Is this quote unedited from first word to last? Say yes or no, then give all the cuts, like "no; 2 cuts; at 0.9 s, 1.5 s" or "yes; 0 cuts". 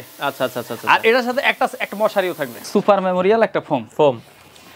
no; 1 cut; at 2.6 s